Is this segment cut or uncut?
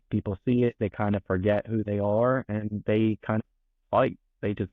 cut